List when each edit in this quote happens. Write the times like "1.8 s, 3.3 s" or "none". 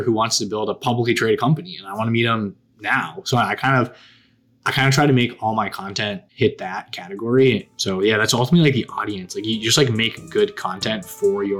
6.3 s, 7.7 s